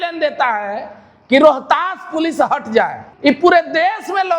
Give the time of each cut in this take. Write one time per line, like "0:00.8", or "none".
0:03.1